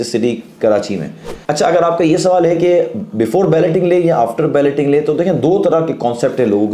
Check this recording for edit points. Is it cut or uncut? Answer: cut